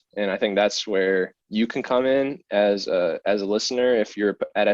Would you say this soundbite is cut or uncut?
cut